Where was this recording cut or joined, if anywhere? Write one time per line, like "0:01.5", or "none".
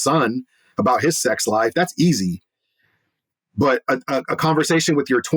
none